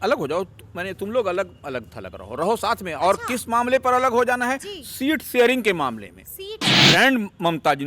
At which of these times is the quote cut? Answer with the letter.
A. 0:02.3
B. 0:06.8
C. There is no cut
B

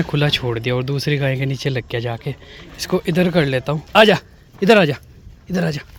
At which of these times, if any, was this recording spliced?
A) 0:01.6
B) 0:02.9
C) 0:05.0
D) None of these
D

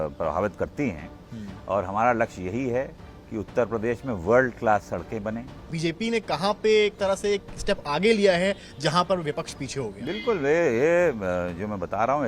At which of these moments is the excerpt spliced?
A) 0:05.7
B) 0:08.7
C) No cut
A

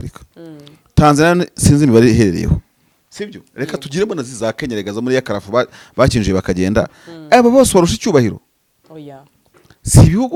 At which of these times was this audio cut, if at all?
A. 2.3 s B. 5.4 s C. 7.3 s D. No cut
D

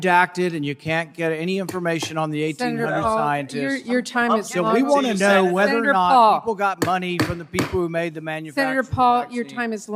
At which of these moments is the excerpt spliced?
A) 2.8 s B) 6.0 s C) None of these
C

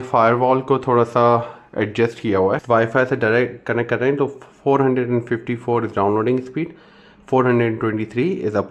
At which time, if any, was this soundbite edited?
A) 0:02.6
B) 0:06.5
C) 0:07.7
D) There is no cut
A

